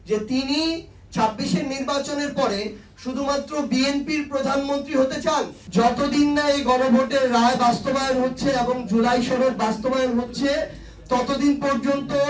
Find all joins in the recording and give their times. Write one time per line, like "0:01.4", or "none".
0:05.6